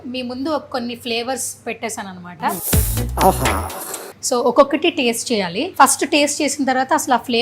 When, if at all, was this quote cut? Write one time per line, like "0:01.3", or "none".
0:02.6
0:04.1
0:05.6